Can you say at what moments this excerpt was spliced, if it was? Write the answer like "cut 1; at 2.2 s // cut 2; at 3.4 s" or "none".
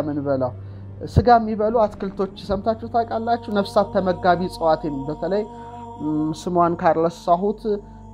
none

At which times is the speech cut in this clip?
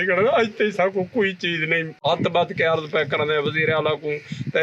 cut 1; at 2.0 s

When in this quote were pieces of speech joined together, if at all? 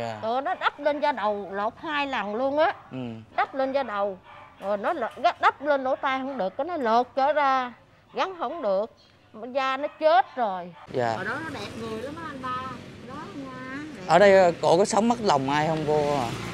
cut 1; at 10.7 s

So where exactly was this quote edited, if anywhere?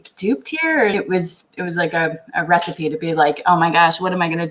cut 1; at 0.9 s

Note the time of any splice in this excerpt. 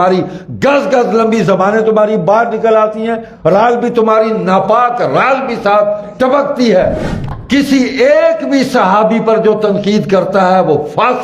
cut 1; at 7.1 s

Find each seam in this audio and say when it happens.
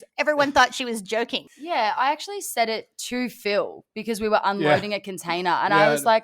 cut 1; at 1.5 s

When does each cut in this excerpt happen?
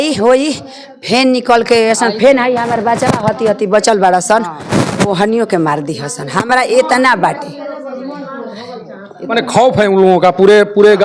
none

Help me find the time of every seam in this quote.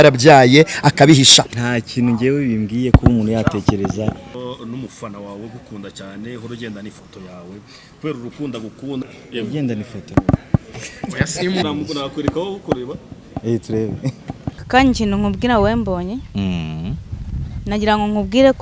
cut 1; at 1.5 s // cut 2; at 4.3 s // cut 3; at 9.0 s // cut 4; at 10.0 s // cut 5; at 11.6 s // cut 6; at 14.6 s

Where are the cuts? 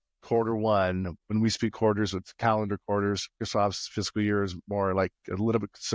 cut 1; at 1.2 s // cut 2; at 3.4 s

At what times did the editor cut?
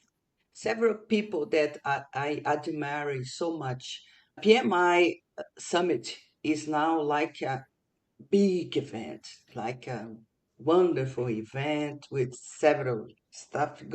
cut 1; at 4.4 s // cut 2; at 5.5 s

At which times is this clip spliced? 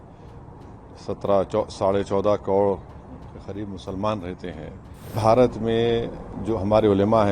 cut 1; at 5.2 s

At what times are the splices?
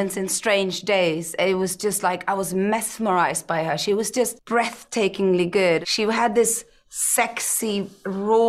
cut 1; at 4.4 s // cut 2; at 5.8 s

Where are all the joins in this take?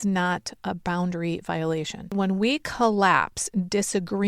cut 1; at 2.1 s

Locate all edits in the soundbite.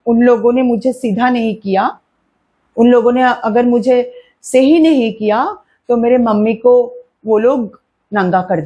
none

